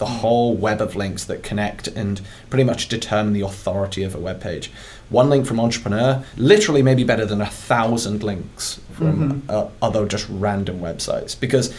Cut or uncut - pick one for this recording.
cut